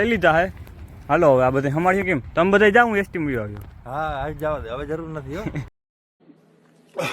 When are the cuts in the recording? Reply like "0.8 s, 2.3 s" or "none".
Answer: 5.7 s